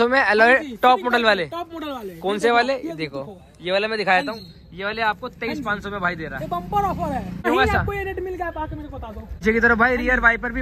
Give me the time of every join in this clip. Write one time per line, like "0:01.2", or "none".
0:07.5
0:09.4